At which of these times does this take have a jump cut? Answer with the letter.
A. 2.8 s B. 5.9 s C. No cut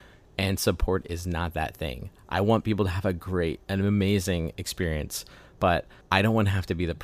B